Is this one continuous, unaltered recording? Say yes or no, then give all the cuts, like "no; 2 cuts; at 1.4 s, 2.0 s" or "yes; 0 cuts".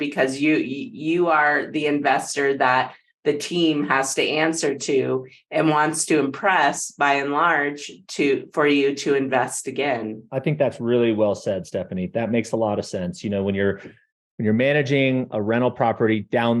no; 1 cut; at 10.3 s